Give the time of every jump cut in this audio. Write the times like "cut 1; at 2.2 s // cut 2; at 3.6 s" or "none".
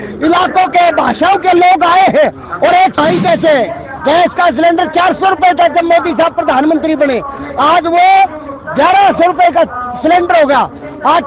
cut 1; at 3.0 s